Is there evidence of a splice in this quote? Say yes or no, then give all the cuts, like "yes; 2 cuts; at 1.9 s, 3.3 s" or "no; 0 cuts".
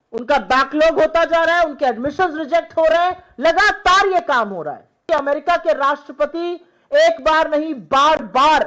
yes; 1 cut; at 5.0 s